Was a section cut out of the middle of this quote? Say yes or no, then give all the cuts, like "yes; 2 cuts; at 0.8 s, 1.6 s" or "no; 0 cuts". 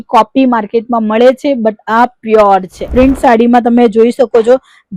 yes; 1 cut; at 2.9 s